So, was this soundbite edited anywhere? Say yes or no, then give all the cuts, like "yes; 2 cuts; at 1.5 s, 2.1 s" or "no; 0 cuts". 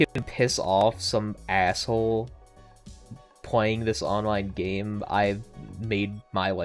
no; 0 cuts